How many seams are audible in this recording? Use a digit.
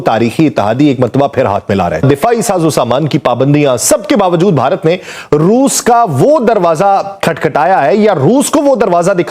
1